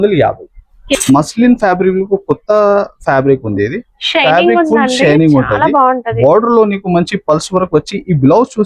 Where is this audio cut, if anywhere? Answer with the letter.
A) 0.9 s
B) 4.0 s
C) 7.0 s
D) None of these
A